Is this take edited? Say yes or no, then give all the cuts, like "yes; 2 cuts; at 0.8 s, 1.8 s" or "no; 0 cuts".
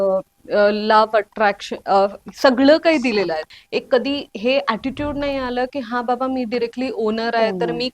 yes; 1 cut; at 3.4 s